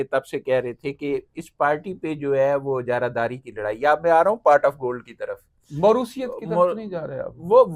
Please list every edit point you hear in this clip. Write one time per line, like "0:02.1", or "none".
none